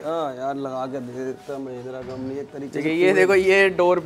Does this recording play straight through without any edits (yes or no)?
yes